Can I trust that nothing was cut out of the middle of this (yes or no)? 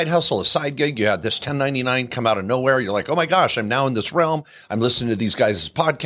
yes